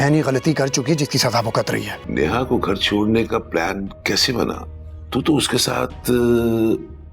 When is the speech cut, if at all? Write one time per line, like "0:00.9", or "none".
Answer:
0:02.0